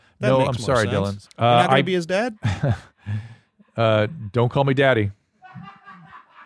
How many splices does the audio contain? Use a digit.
2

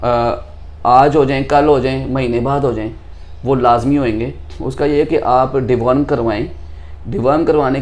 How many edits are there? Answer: 0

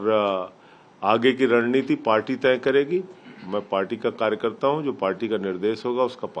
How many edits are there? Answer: 0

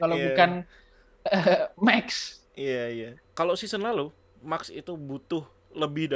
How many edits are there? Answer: 1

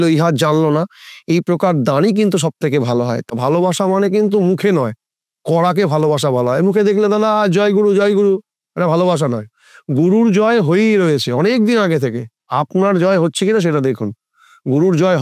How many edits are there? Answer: 2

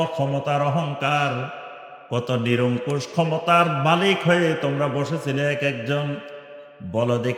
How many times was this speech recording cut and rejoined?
0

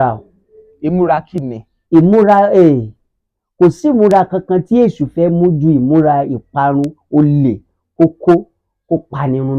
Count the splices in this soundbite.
0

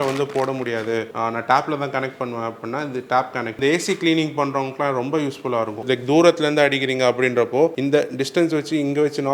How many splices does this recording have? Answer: 4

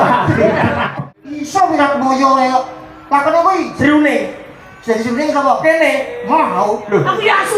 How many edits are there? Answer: 1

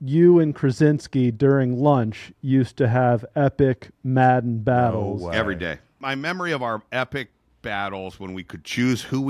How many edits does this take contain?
1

